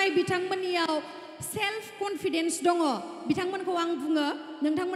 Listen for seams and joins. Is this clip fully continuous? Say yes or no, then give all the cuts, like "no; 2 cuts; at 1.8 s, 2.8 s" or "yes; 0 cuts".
yes; 0 cuts